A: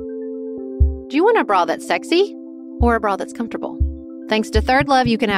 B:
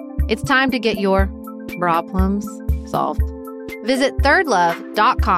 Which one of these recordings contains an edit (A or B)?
A